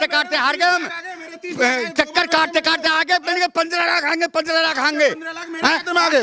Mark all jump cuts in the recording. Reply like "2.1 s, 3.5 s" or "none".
none